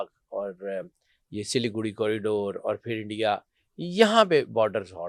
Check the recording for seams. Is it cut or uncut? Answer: uncut